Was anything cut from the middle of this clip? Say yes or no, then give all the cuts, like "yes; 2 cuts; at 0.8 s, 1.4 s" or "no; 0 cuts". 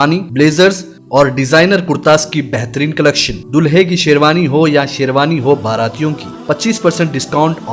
no; 0 cuts